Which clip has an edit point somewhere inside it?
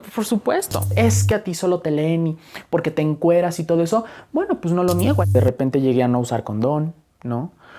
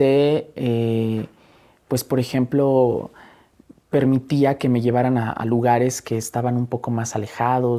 first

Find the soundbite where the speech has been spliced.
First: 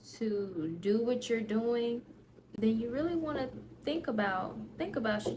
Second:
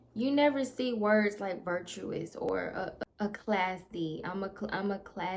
second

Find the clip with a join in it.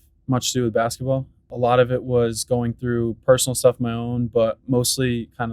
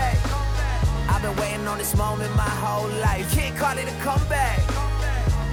first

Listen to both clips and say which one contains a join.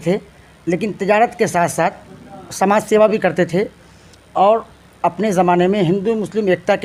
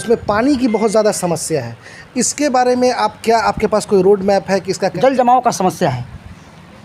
second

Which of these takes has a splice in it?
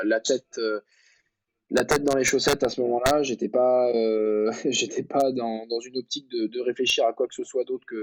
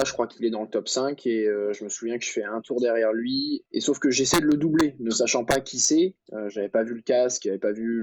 second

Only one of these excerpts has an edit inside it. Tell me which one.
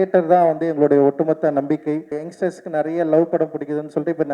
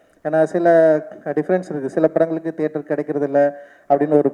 first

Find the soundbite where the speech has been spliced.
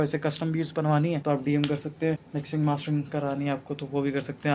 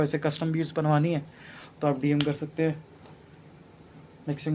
first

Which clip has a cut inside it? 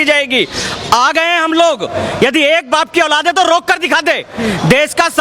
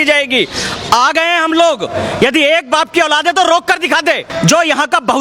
second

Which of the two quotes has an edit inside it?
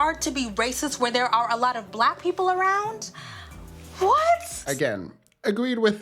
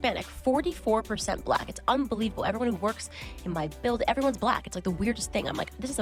first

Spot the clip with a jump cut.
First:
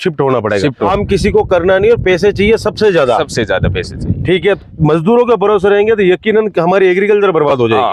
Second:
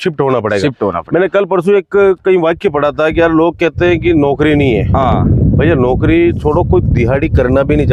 first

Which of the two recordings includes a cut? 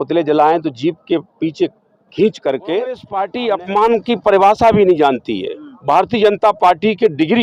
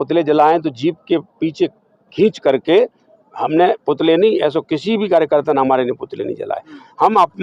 first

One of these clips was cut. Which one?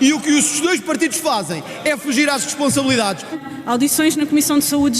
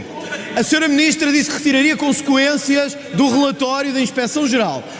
first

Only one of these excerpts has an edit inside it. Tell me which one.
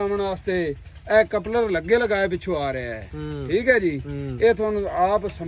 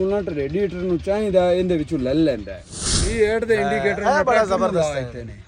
second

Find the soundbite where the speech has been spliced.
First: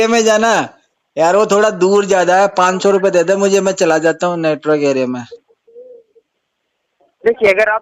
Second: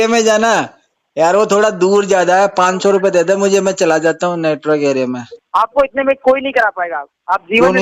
second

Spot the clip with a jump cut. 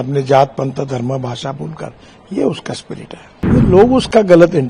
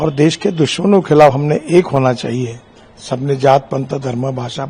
first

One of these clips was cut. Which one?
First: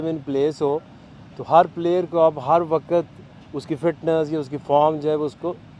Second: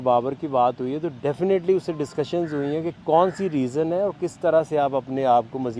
second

